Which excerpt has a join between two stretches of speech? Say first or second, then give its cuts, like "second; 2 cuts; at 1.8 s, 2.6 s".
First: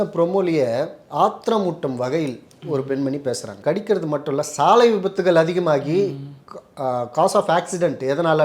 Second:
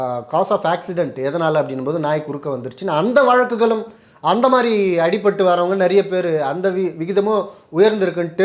first; 2 cuts; at 1.0 s, 3.6 s